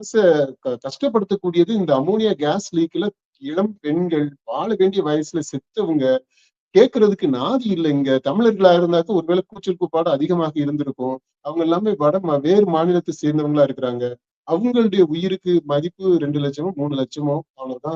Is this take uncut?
yes; 0 cuts

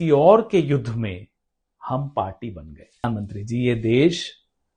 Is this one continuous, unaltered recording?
no; 1 cut; at 3.0 s

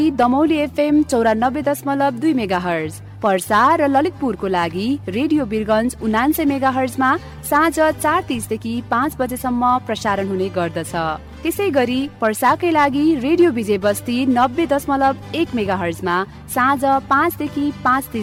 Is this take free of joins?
yes; 0 cuts

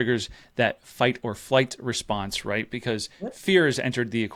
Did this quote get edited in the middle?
no; 0 cuts

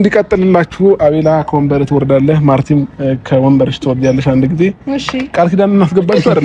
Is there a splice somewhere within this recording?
no; 0 cuts

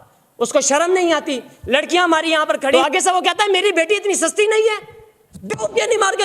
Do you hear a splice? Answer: yes; 1 cut; at 2.7 s

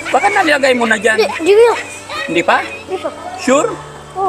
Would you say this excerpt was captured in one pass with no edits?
yes; 0 cuts

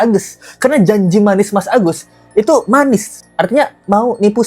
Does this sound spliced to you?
no; 0 cuts

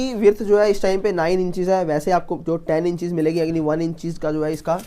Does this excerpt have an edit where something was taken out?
no; 0 cuts

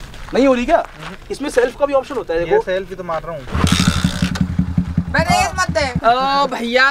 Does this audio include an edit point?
no; 0 cuts

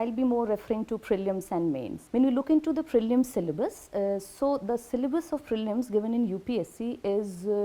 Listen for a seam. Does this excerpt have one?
yes; 1 cut; at 2.0 s

